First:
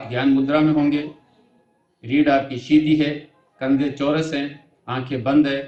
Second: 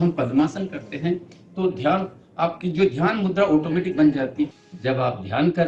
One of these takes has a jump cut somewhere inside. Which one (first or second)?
second